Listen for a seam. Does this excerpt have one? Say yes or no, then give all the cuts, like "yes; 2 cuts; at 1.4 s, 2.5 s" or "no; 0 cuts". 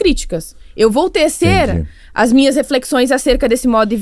no; 0 cuts